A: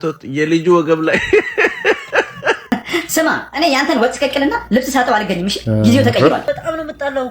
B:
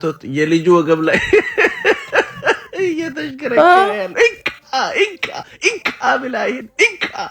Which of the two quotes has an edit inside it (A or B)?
A